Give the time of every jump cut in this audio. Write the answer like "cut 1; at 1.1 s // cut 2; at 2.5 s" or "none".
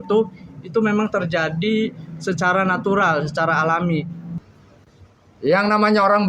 cut 1; at 4.2 s